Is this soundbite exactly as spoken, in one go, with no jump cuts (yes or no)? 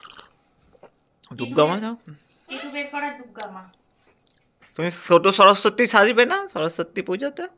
yes